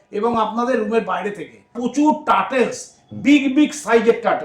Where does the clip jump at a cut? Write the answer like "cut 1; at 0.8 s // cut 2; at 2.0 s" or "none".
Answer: cut 1; at 1.7 s